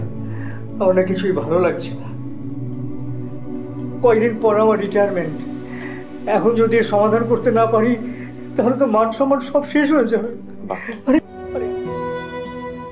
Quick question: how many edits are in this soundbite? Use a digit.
1